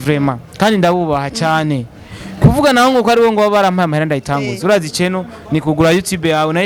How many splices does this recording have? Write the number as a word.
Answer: zero